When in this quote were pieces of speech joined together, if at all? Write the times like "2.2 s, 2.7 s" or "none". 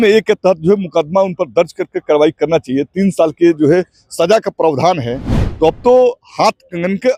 none